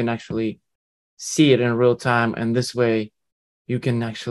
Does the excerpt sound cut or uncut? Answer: uncut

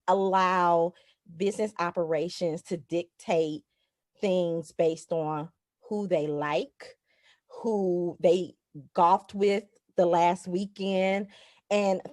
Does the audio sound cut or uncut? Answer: uncut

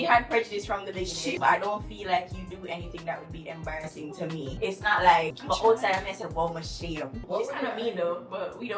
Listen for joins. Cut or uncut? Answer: cut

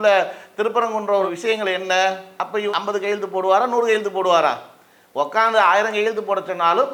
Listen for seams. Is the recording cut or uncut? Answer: uncut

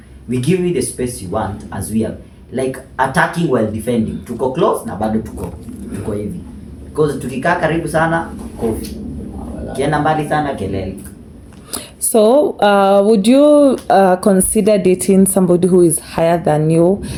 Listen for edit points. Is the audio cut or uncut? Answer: uncut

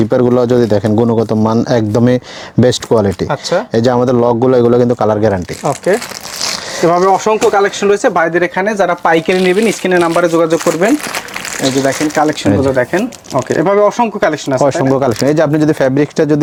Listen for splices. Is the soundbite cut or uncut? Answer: uncut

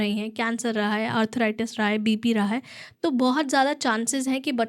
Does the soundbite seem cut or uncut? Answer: uncut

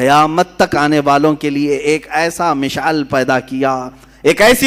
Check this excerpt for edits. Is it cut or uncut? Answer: uncut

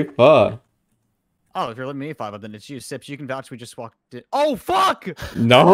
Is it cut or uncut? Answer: uncut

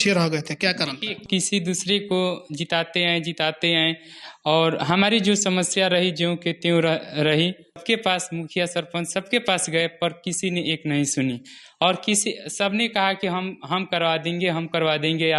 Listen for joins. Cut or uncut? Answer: cut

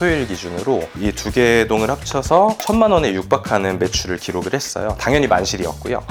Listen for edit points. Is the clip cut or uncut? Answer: uncut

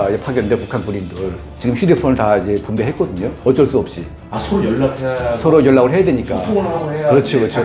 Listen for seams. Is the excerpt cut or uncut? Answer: uncut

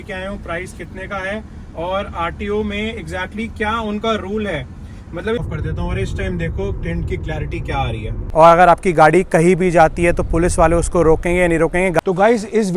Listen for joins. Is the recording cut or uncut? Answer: cut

